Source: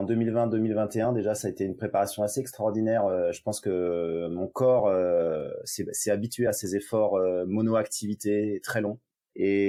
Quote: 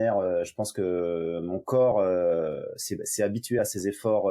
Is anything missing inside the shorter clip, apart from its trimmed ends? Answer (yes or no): no